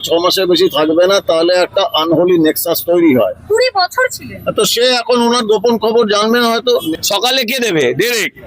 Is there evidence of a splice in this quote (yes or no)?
yes